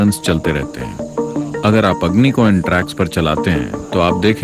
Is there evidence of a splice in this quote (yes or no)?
no